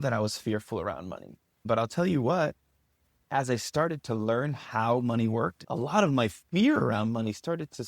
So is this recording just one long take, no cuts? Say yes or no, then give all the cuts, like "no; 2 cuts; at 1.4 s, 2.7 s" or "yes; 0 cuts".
no; 2 cuts; at 1.6 s, 5.6 s